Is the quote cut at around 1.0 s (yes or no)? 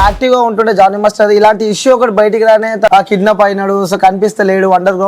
no